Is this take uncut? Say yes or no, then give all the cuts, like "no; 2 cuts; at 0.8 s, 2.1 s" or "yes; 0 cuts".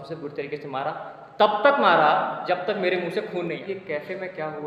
no; 1 cut; at 3.6 s